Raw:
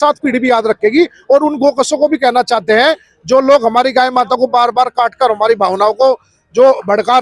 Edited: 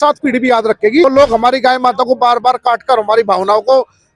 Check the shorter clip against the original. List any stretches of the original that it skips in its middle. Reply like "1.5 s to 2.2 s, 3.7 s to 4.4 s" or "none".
1.0 s to 3.4 s